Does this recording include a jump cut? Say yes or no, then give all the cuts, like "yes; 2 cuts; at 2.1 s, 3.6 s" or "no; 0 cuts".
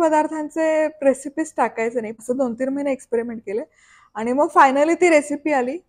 yes; 1 cut; at 2.1 s